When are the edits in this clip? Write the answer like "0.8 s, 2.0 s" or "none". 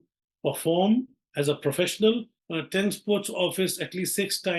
2.4 s